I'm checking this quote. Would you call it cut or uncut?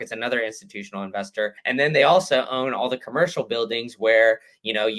cut